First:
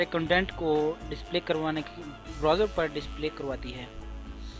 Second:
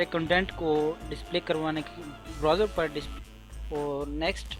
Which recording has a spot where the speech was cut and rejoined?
first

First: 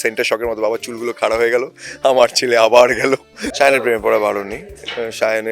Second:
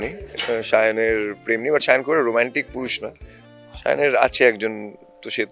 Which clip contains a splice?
first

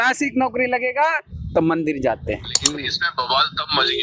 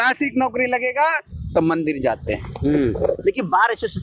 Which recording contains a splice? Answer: first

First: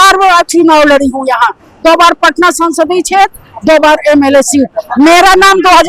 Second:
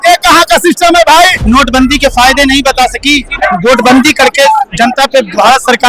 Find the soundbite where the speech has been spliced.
second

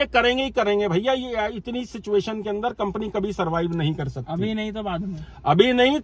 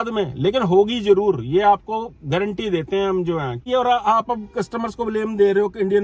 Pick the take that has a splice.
second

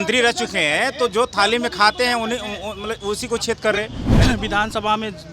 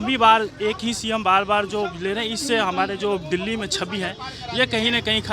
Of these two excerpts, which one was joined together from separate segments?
first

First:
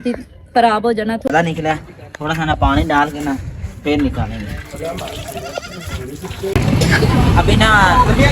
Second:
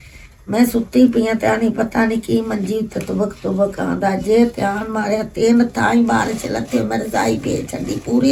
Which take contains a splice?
first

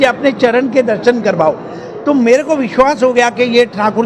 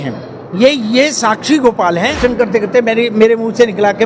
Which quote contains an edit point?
second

